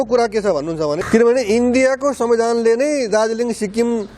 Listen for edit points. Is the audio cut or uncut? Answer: cut